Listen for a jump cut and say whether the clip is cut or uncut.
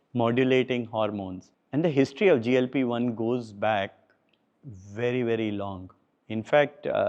uncut